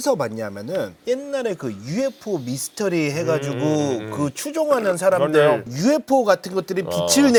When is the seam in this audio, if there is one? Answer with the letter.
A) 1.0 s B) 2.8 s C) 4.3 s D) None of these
D